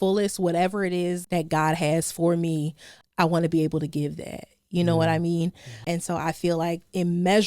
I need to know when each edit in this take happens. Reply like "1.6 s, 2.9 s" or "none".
1.2 s, 3.0 s, 5.8 s